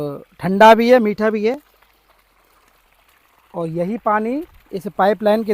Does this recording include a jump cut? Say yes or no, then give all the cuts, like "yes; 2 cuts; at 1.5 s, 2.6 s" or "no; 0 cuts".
no; 0 cuts